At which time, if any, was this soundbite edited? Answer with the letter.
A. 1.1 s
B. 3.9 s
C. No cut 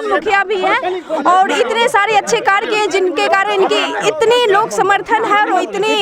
C